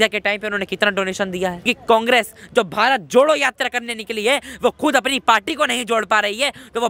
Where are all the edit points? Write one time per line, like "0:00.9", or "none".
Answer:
0:01.7